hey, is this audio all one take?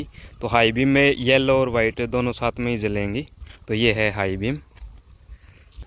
yes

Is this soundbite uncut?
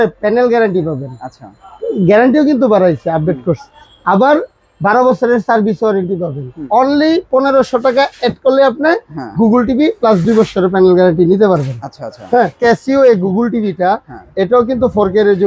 no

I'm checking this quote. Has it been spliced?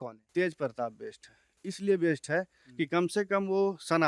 no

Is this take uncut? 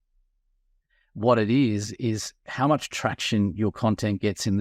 yes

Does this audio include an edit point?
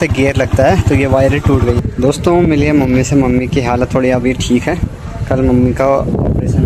yes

